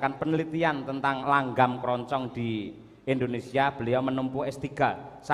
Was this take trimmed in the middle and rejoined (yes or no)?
no